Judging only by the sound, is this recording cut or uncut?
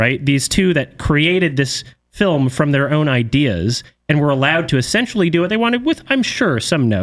uncut